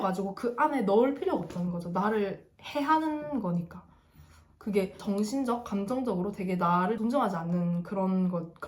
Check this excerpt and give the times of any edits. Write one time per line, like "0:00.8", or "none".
0:05.0
0:07.0